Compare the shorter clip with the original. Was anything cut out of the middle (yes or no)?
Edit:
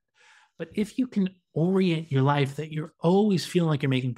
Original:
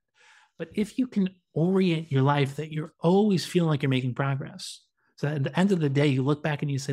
no